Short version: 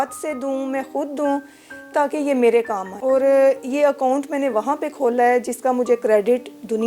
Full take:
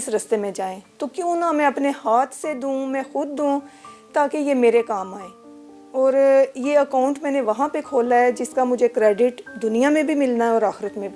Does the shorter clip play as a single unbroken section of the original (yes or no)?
no